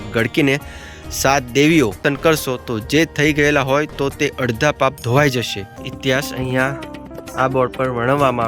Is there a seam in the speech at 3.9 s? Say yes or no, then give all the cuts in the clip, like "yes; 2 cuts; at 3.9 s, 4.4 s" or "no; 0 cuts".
no; 2 cuts; at 2.0 s, 5.8 s